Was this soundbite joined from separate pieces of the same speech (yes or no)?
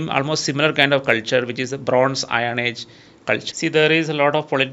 yes